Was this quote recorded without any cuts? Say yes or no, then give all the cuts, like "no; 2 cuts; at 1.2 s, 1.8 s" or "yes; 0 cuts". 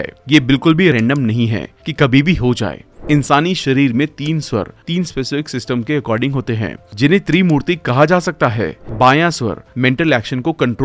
no; 2 cuts; at 2.9 s, 8.8 s